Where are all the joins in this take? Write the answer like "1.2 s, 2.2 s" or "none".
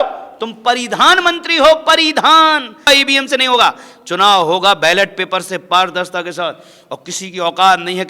2.9 s